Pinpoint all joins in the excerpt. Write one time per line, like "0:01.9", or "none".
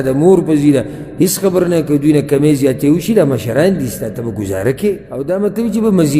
0:05.1

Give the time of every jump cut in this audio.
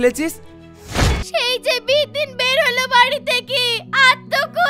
0:01.2

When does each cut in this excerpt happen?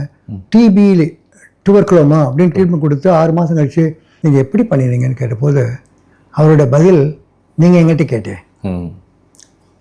0:04.1

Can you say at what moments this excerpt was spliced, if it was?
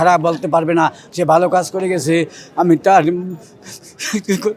none

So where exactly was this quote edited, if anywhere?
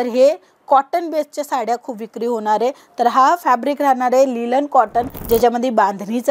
0:05.2

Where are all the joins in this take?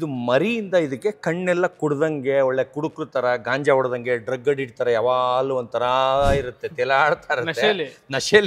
none

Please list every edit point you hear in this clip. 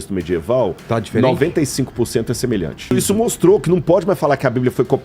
0:02.9

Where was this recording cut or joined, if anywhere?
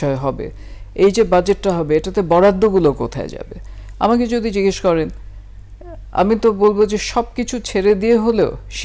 none

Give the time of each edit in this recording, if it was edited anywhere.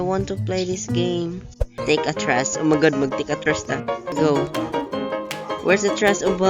0:01.8
0:04.1

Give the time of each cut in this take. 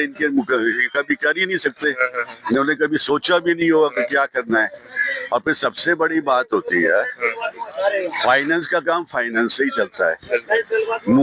none

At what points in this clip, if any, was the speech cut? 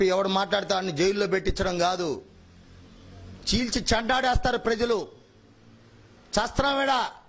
none

